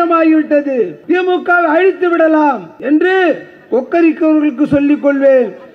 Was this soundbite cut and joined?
yes; 2 cuts; at 1.0 s, 2.7 s

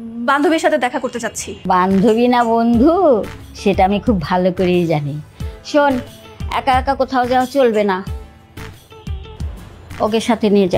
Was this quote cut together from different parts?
yes; 1 cut; at 1.5 s

